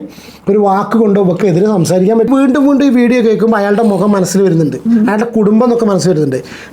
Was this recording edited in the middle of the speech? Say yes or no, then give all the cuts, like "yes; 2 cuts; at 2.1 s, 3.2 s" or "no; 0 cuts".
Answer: yes; 1 cut; at 2.3 s